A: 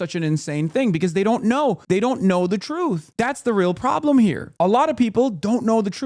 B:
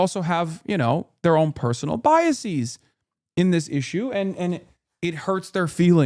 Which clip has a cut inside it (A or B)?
A